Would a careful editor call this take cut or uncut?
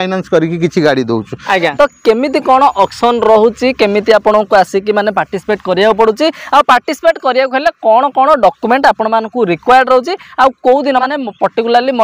cut